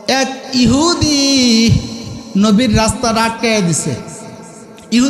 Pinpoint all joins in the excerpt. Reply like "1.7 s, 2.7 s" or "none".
none